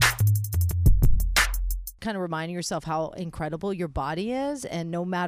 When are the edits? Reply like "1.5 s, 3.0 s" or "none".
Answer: 1.9 s